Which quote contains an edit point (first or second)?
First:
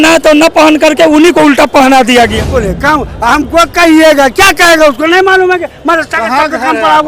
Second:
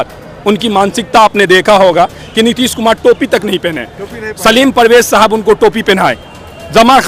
first